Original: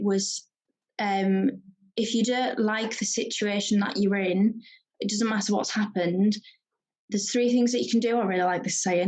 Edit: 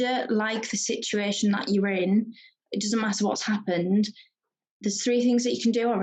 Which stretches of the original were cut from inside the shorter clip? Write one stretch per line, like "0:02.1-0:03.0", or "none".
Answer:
none

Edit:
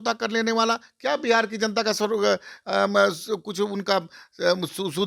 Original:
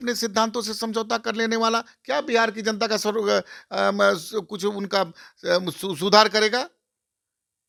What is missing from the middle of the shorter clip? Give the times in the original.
none

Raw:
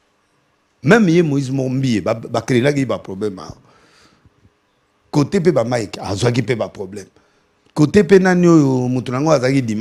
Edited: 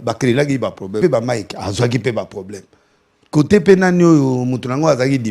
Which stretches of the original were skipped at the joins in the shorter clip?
0:03.3-0:05.4

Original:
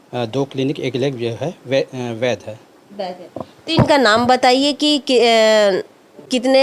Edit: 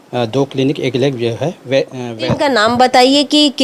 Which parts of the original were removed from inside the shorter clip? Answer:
0:02.1-0:03.6

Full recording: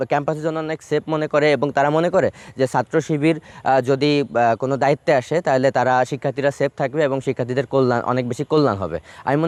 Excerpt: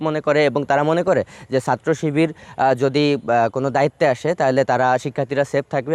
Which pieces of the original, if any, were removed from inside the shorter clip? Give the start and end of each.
none

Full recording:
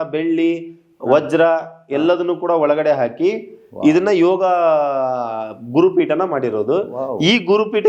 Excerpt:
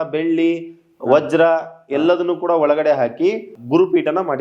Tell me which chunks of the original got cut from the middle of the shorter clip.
0:03.5-0:05.6

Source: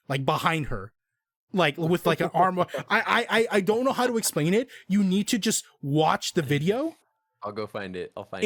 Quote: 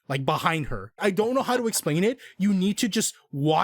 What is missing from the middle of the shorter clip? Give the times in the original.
0:01.0-0:03.5

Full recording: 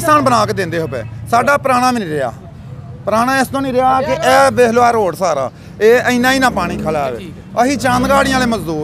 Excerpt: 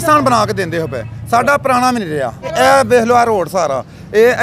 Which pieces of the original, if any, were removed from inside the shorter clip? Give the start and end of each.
0:02.5-0:04.1

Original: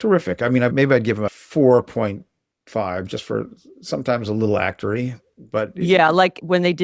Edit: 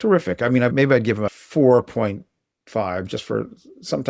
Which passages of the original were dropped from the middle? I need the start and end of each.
none

